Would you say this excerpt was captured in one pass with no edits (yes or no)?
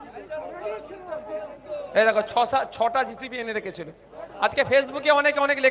yes